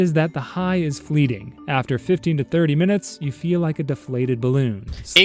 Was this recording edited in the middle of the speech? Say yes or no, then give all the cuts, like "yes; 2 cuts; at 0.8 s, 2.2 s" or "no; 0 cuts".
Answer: no; 0 cuts